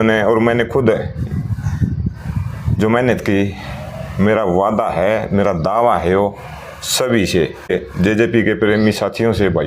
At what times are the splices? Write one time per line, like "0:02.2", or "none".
0:07.7